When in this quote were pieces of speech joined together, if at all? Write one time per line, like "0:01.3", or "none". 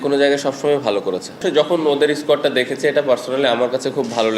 0:01.3